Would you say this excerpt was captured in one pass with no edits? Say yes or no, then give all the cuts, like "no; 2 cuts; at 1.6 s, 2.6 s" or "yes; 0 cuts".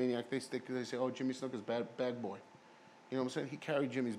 yes; 0 cuts